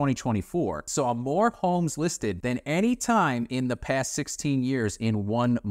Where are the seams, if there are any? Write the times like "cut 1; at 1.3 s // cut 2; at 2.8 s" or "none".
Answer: cut 1; at 0.8 s // cut 2; at 2.4 s